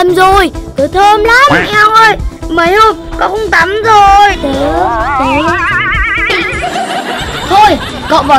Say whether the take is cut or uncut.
cut